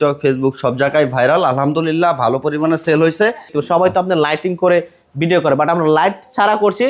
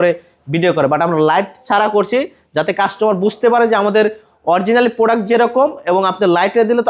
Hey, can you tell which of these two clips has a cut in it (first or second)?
first